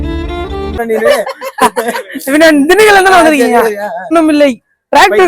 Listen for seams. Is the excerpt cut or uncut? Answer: cut